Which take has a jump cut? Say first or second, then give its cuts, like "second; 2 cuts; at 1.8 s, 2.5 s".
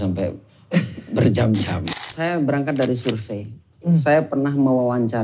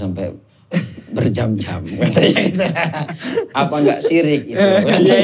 first; 1 cut; at 1.9 s